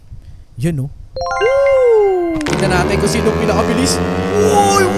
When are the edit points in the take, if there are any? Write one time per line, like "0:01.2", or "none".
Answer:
0:02.5